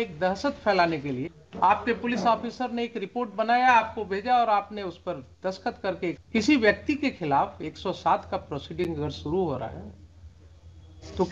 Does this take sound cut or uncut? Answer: cut